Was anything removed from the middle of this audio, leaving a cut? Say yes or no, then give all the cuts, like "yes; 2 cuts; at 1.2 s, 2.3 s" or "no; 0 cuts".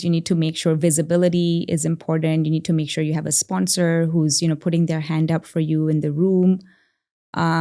no; 0 cuts